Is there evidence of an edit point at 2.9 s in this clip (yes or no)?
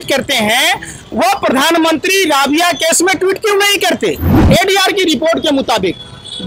no